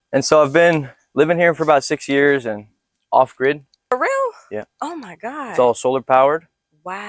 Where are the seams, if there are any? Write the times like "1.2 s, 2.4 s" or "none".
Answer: 3.9 s